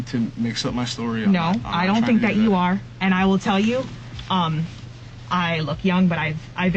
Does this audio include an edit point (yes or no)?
no